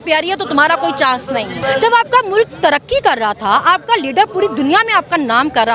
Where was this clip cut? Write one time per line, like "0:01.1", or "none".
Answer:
0:01.6